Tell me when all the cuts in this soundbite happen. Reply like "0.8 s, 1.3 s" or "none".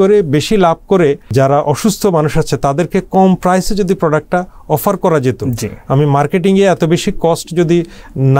1.3 s